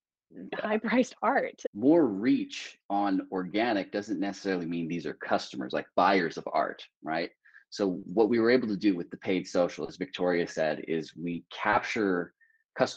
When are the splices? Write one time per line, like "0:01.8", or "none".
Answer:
0:01.6